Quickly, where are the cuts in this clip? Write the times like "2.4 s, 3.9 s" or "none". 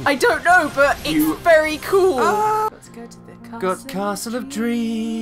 2.7 s

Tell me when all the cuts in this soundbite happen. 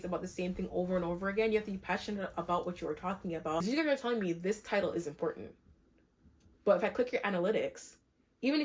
3.6 s

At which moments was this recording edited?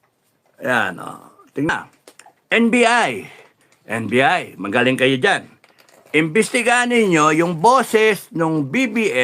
1.7 s

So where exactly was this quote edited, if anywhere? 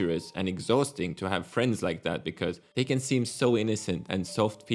2.6 s

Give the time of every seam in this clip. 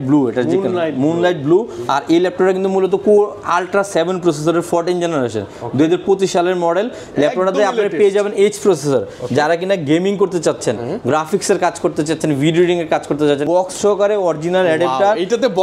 13.4 s

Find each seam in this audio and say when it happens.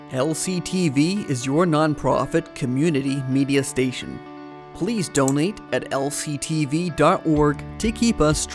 none

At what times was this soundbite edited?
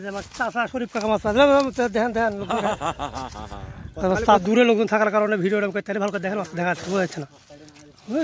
4.4 s

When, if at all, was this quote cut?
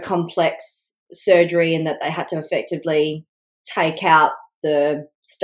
none

